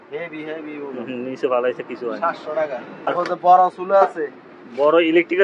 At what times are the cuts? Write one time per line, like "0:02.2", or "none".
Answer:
0:03.1